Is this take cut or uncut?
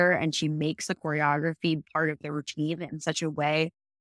cut